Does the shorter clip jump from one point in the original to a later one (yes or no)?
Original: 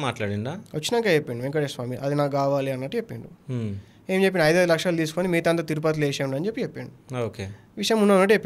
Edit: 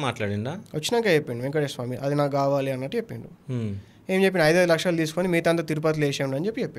no